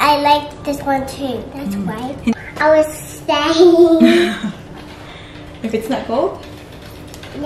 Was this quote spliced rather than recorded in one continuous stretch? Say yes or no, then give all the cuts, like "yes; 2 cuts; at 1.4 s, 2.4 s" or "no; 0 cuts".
yes; 1 cut; at 2.3 s